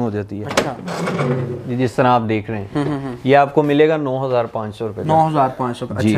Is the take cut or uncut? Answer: uncut